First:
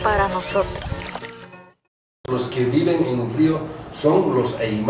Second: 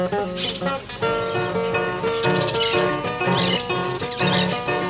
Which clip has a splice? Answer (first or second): first